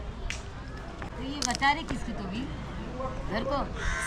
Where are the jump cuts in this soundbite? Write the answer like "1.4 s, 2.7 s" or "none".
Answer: 1.1 s